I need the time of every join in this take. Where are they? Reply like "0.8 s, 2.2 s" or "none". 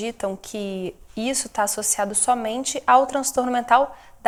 none